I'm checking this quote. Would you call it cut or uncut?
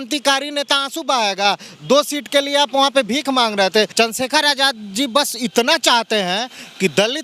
cut